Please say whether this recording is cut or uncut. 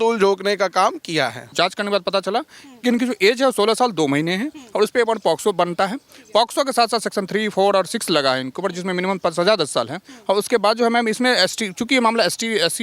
cut